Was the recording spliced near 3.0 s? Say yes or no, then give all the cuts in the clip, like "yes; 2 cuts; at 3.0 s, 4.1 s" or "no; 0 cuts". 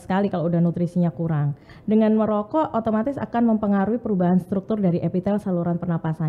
no; 1 cut; at 1.7 s